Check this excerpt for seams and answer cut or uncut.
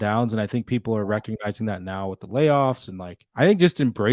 uncut